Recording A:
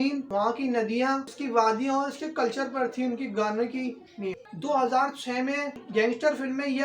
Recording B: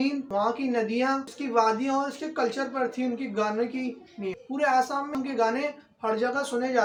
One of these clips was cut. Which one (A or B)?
A